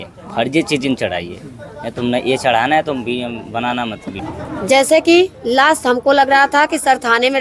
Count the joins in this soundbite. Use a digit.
1